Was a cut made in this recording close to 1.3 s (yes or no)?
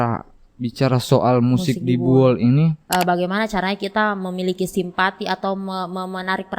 no